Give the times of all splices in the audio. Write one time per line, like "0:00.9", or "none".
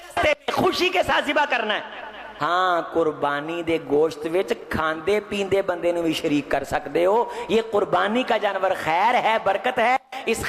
0:02.3